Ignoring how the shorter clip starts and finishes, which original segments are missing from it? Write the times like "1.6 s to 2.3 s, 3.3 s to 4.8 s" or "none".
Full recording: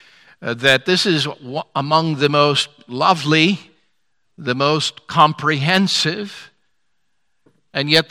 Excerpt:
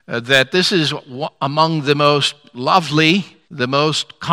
3.7 s to 4.3 s

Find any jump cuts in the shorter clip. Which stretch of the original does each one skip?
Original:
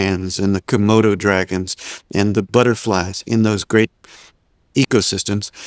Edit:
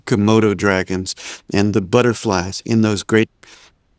none

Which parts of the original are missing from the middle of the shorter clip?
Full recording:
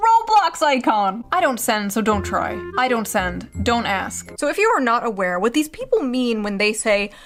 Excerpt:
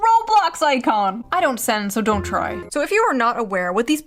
2.6 s to 4.3 s

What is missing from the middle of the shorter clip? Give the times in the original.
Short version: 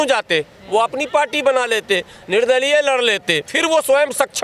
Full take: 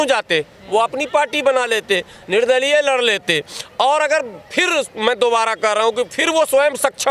3.5 s to 6.2 s

